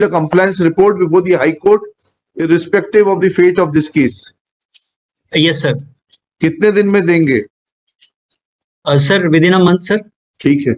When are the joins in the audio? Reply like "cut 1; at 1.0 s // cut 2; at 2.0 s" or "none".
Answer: none